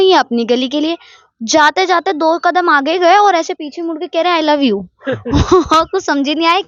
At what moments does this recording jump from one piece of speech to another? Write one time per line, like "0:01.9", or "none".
none